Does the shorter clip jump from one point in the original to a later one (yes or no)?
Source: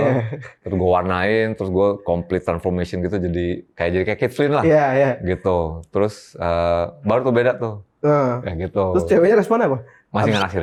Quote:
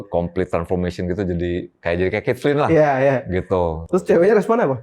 yes